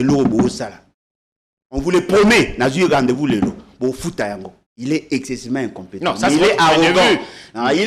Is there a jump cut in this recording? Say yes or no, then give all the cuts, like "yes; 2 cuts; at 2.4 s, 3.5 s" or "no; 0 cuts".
yes; 1 cut; at 4.7 s